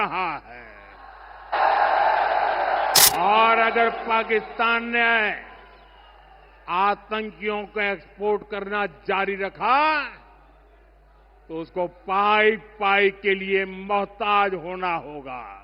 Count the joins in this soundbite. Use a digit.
1